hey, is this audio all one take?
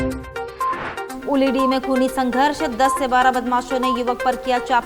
no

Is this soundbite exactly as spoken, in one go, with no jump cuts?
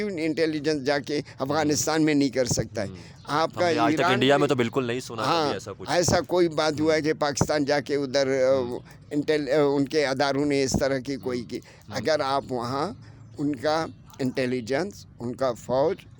yes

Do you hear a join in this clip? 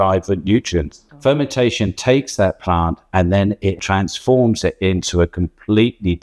yes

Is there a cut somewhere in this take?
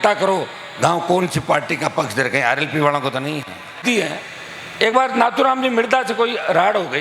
yes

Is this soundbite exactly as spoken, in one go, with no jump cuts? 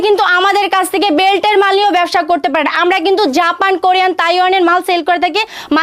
yes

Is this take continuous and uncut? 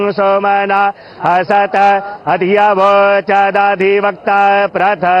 no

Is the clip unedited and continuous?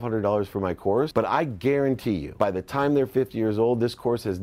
no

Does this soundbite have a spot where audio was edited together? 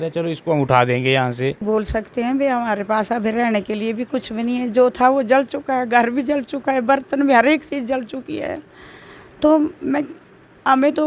yes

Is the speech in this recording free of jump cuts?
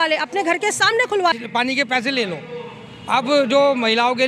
no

